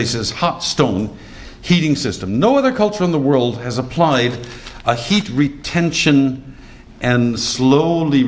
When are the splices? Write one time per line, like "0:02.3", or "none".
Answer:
none